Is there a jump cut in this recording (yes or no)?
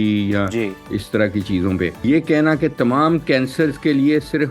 yes